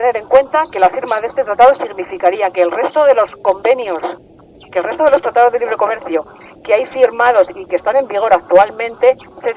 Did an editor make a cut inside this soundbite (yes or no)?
yes